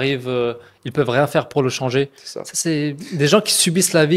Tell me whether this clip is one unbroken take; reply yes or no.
yes